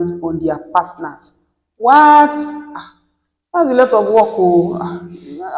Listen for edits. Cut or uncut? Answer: uncut